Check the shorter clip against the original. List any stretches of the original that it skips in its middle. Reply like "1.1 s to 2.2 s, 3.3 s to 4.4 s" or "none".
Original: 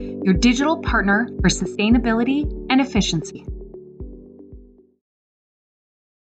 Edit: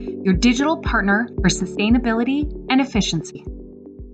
3.2 s to 3.7 s